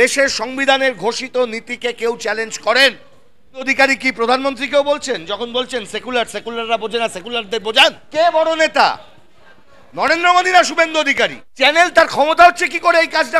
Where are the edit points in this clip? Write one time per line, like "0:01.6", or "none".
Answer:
0:03.7
0:08.0
0:11.4